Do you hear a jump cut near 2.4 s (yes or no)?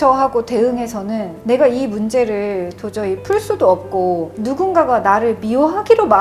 no